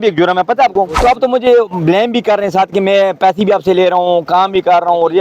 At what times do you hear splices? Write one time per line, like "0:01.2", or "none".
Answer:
0:00.9